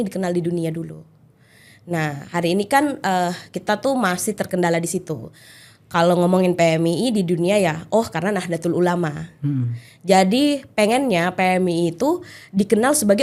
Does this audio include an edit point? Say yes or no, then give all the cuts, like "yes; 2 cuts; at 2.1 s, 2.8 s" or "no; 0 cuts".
no; 0 cuts